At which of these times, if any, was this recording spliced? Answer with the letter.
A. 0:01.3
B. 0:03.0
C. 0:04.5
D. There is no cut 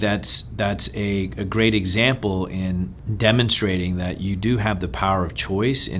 B